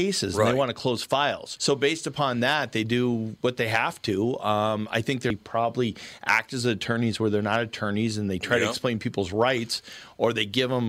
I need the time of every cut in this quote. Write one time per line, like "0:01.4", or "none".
0:05.3